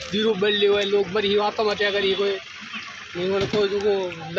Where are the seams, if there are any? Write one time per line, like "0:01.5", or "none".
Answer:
none

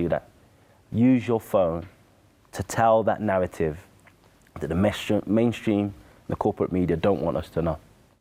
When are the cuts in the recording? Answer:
none

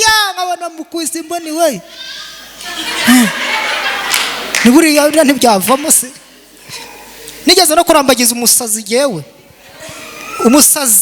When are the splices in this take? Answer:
none

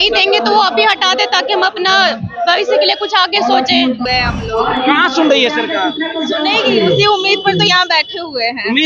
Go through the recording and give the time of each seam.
0:04.0

